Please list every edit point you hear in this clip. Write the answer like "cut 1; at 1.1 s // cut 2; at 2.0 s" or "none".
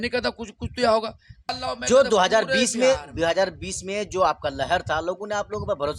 cut 1; at 1.5 s